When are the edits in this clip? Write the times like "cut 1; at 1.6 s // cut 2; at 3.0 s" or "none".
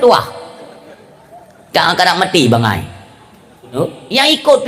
cut 1; at 3.7 s